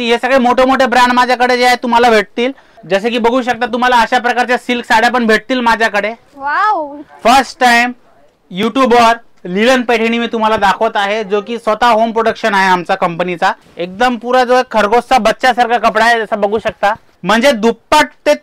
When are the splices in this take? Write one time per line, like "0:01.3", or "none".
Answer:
0:02.7
0:07.0
0:13.7
0:17.1